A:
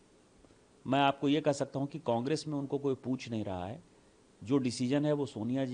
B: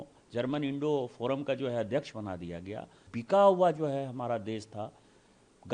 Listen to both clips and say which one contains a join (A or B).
B